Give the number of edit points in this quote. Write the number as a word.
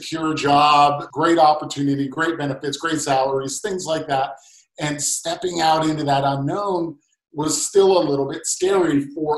one